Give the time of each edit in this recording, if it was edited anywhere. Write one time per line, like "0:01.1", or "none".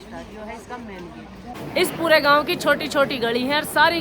0:01.5